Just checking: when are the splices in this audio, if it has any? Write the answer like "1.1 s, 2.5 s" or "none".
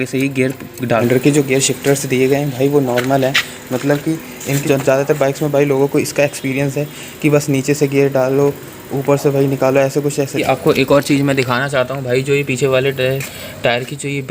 1.0 s, 4.6 s, 10.4 s

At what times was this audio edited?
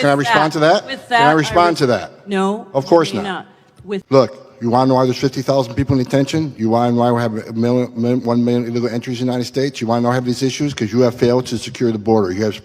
4.0 s

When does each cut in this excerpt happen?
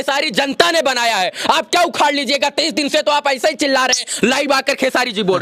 none

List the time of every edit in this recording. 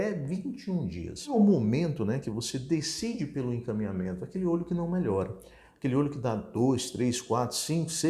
1.3 s

